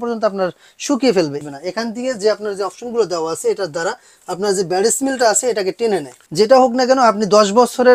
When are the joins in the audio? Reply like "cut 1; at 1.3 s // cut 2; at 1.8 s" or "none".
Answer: cut 1; at 1.4 s // cut 2; at 6.2 s